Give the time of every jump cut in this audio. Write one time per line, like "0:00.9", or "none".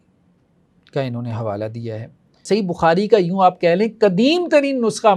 0:02.4